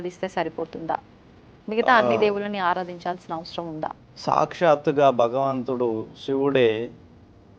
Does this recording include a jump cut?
yes; 1 cut; at 4.1 s

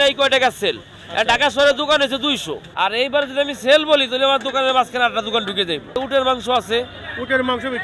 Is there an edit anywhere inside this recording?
yes; 2 cuts; at 2.6 s, 6.0 s

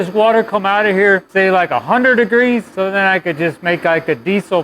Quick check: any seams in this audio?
yes; 2 cuts; at 1.3 s, 2.7 s

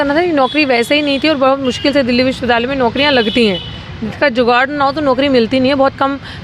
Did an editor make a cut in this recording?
no; 0 cuts

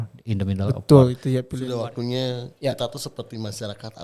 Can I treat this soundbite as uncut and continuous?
no; 1 cut; at 1.5 s

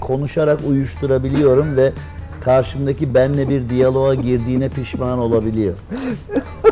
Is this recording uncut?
yes; 0 cuts

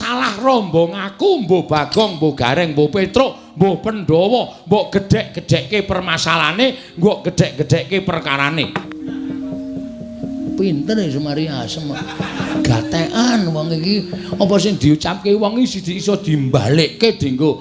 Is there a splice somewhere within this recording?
yes; 2 cuts; at 8.8 s, 12.5 s

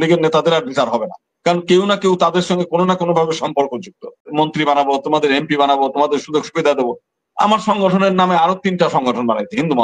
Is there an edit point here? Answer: yes; 1 cut; at 4.3 s

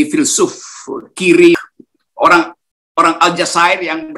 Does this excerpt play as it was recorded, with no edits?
no; 1 cut; at 1.6 s

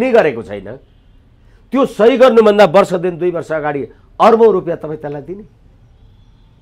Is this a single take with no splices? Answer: yes; 0 cuts

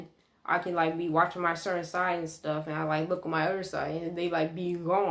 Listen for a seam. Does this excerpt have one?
no; 0 cuts

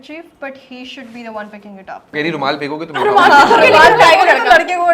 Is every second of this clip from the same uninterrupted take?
no; 1 cut; at 2.1 s

